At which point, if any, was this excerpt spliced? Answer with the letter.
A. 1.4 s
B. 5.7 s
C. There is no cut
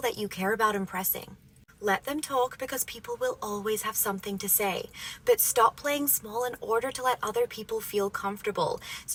C